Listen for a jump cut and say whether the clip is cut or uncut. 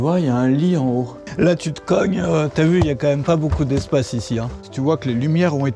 cut